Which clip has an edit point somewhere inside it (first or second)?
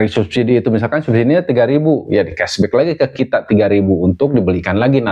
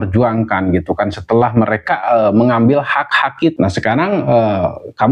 second